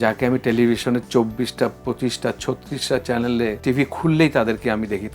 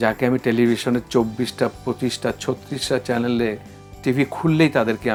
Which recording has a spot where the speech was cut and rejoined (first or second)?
first